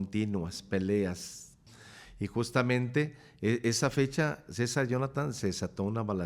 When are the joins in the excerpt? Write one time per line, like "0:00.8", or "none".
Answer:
0:01.7